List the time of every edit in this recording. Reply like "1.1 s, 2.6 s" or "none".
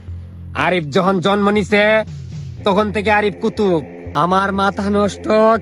4.0 s